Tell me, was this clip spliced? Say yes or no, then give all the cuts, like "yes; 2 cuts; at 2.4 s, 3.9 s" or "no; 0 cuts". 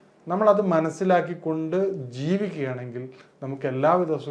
no; 0 cuts